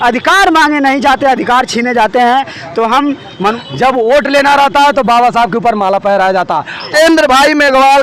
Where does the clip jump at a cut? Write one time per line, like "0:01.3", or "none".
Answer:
0:03.5
0:06.8